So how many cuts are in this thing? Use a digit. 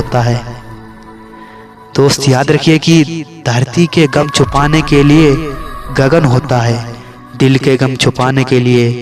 0